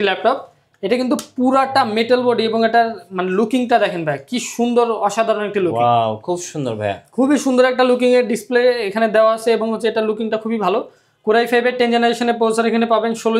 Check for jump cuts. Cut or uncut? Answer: uncut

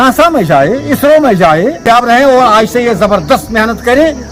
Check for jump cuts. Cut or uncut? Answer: uncut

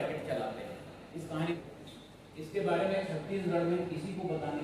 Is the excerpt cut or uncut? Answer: cut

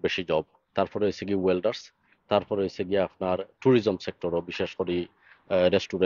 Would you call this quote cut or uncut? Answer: uncut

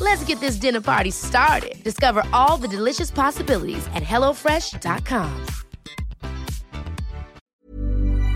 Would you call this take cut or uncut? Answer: cut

